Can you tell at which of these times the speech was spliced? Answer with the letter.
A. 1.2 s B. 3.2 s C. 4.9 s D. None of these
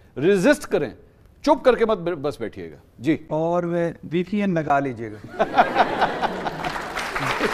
D